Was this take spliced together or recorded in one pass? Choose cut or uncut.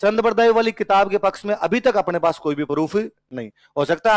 uncut